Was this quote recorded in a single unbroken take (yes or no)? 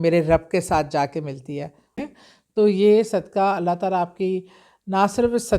no